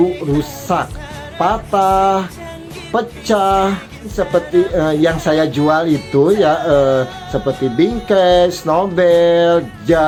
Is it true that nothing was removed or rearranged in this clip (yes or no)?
yes